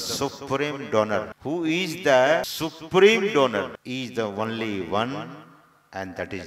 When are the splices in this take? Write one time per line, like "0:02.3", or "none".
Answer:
0:01.3
0:02.5
0:03.8